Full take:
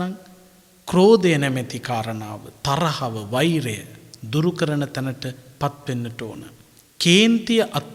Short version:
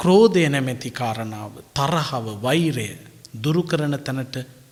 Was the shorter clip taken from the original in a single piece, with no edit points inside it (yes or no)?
yes